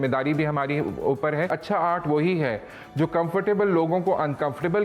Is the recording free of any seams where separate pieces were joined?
no; 1 cut; at 1.5 s

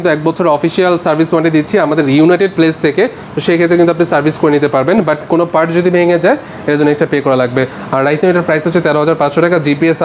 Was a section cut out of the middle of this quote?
no; 0 cuts

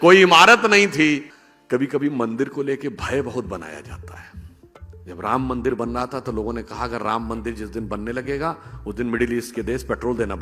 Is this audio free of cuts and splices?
no; 1 cut; at 1.3 s

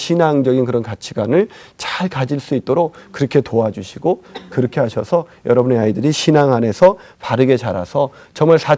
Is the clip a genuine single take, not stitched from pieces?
yes; 0 cuts

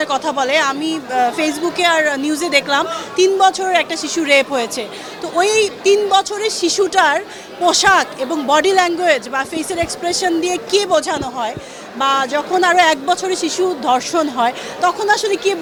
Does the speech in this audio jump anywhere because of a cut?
no; 0 cuts

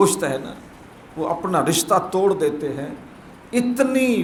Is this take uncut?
yes; 0 cuts

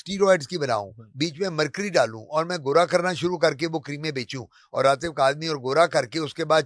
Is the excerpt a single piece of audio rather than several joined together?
yes; 0 cuts

